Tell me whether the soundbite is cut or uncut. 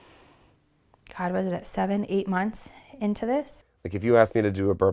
cut